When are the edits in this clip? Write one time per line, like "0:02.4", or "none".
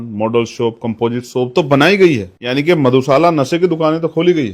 0:02.4